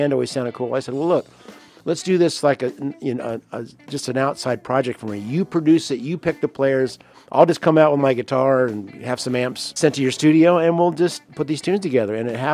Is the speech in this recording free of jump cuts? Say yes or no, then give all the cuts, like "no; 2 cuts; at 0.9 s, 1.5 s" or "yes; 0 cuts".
no; 2 cuts; at 9.8 s, 11.3 s